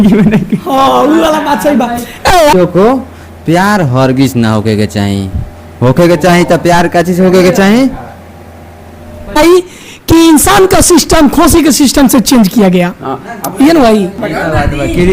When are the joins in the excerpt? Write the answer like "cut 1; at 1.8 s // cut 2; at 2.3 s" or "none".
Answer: cut 1; at 2.5 s // cut 2; at 9.4 s // cut 3; at 14.2 s